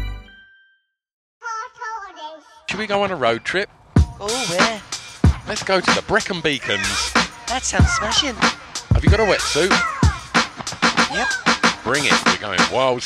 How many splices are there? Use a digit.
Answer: 1